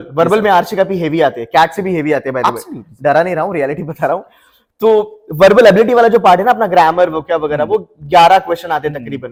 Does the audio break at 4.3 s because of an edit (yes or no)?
no